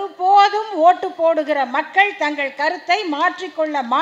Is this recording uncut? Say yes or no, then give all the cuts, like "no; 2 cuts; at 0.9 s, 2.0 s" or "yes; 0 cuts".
yes; 0 cuts